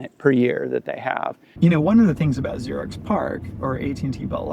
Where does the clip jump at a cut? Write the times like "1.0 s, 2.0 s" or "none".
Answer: 1.4 s